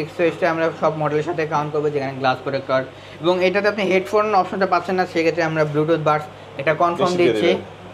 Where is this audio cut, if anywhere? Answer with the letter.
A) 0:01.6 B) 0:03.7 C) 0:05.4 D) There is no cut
D